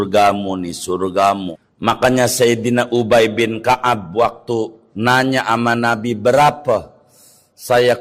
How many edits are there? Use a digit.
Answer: 2